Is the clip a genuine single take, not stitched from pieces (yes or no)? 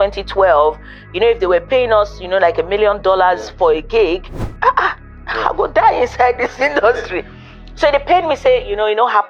yes